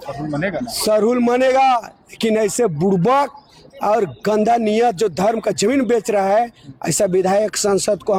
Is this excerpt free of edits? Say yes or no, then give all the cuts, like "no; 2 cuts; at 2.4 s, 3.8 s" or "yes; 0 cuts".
yes; 0 cuts